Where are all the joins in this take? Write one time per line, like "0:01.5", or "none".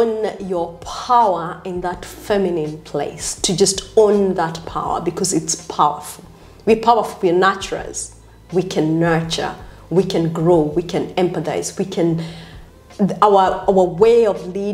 none